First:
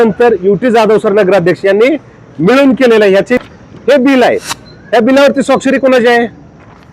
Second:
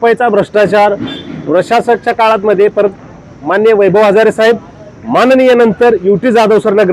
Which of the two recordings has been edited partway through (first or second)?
first